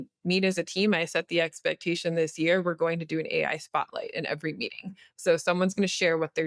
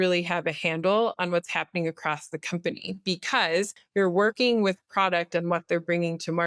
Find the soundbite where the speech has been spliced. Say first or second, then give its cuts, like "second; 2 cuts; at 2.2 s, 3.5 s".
second; 1 cut; at 3.8 s